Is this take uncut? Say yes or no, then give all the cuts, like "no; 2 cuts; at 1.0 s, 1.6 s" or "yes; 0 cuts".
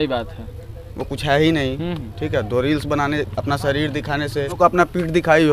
no; 1 cut; at 4.6 s